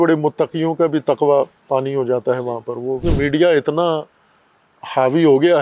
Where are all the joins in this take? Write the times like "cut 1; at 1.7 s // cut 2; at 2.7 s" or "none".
cut 1; at 3.1 s